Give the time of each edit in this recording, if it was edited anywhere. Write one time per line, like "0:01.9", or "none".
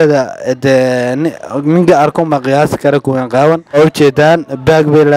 0:03.8